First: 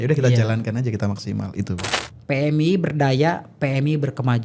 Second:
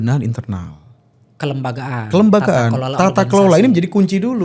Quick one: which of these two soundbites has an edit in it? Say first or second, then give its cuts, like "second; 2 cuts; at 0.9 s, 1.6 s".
first; 1 cut; at 1.9 s